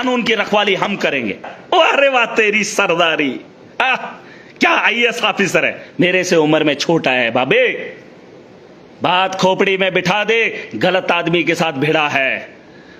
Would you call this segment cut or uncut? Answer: cut